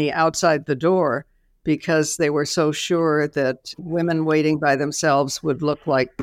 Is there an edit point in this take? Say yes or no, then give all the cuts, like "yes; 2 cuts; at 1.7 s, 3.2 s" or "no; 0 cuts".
no; 0 cuts